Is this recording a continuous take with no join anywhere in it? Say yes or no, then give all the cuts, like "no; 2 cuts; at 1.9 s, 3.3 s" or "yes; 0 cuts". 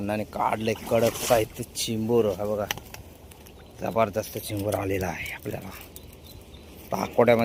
yes; 0 cuts